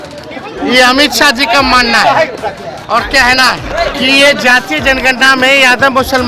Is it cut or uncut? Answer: cut